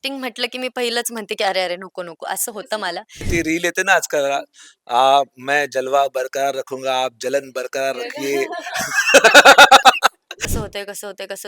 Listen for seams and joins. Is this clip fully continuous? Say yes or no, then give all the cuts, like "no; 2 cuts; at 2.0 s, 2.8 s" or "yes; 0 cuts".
no; 2 cuts; at 3.3 s, 10.3 s